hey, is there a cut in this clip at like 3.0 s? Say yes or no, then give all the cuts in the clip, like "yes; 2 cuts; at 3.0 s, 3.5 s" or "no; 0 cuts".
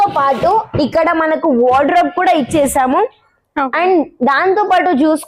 no; 0 cuts